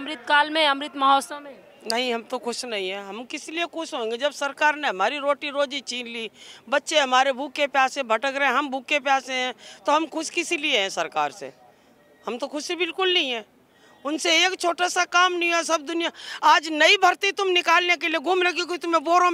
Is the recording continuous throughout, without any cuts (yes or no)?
yes